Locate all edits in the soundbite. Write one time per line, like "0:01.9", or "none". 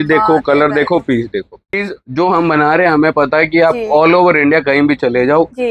0:01.8